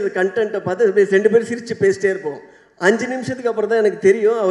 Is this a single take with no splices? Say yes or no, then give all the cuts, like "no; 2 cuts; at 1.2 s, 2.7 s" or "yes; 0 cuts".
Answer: yes; 0 cuts